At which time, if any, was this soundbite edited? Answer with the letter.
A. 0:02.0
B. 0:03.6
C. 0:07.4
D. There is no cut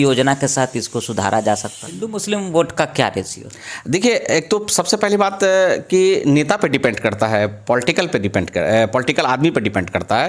A